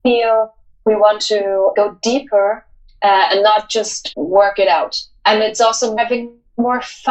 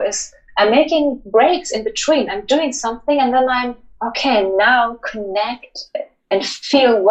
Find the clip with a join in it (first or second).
first